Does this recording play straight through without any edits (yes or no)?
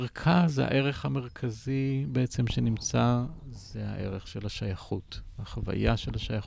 yes